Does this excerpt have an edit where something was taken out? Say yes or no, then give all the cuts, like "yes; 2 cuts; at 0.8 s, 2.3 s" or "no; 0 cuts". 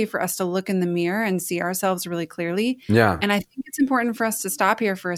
no; 0 cuts